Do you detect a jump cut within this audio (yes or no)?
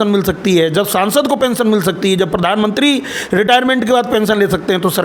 no